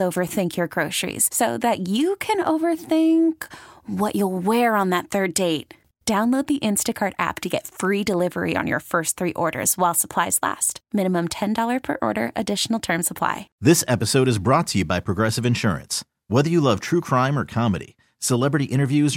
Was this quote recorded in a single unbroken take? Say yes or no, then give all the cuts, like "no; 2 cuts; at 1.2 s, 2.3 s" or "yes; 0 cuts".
no; 1 cut; at 13.5 s